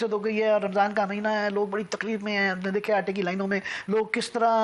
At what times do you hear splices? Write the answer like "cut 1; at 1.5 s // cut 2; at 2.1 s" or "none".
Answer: none